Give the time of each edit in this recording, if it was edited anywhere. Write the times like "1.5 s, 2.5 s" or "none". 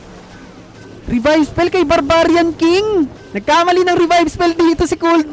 1.0 s, 3.3 s